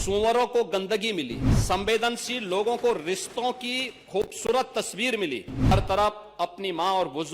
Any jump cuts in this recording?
yes; 2 cuts; at 1.5 s, 5.7 s

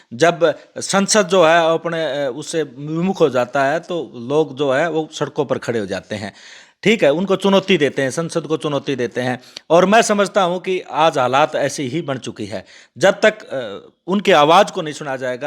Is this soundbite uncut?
yes; 0 cuts

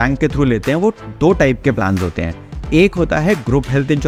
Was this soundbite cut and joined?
no; 0 cuts

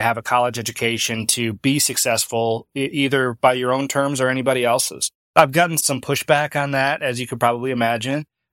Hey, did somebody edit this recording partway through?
no; 0 cuts

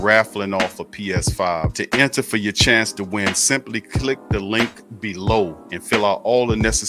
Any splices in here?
no; 0 cuts

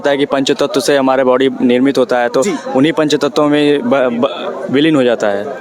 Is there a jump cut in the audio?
no; 0 cuts

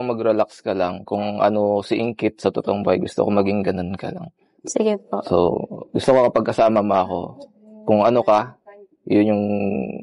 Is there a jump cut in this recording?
yes; 1 cut; at 1.9 s

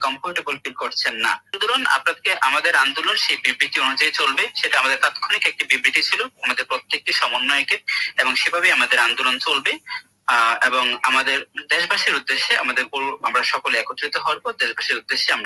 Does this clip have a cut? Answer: yes; 1 cut; at 1.6 s

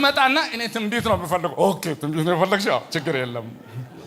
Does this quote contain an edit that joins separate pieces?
no; 0 cuts

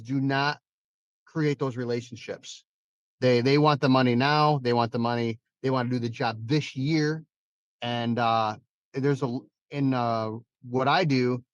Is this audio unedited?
yes; 0 cuts

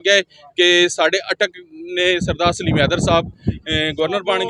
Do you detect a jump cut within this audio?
no; 0 cuts

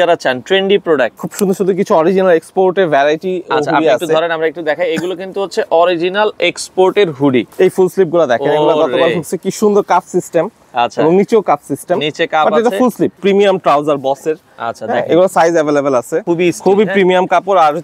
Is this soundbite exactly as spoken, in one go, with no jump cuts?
no; 4 cuts; at 1.2 s, 7.5 s, 13.2 s, 16.2 s

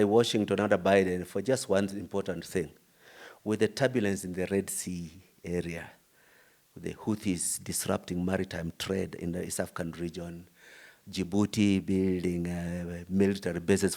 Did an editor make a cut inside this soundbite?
no; 0 cuts

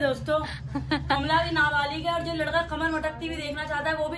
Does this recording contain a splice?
no; 0 cuts

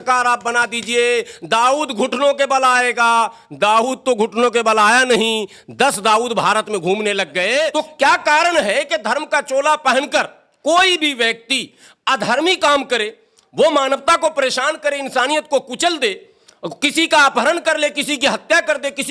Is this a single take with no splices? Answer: no; 1 cut; at 7.7 s

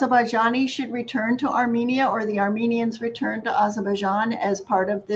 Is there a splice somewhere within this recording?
no; 0 cuts

